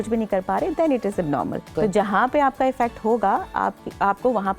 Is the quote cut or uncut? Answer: cut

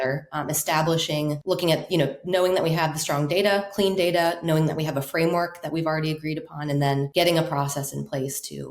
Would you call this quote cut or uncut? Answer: cut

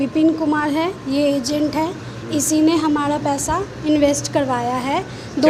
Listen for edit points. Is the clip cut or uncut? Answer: uncut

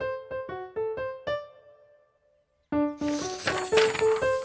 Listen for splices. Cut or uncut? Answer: cut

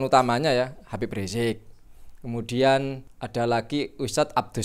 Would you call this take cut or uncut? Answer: cut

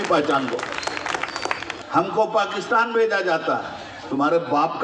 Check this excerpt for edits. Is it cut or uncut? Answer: cut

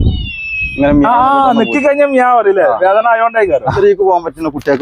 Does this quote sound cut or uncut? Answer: cut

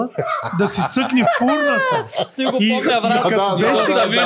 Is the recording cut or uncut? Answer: uncut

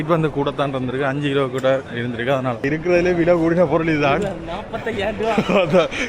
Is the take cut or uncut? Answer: cut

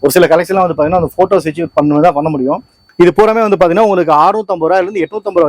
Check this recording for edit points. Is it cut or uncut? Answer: cut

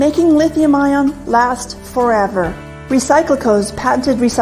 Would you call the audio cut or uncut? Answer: cut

